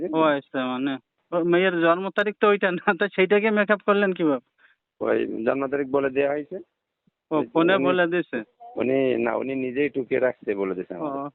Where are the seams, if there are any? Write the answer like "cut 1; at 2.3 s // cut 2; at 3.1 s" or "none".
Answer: cut 1; at 1.1 s